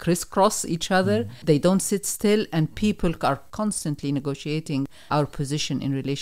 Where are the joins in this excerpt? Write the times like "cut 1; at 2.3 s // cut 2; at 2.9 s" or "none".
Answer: cut 1; at 1.3 s // cut 2; at 3.5 s // cut 3; at 5.0 s